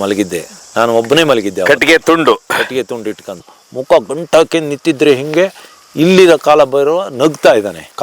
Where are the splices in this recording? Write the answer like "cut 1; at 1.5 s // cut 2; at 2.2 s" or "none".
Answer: cut 1; at 3.5 s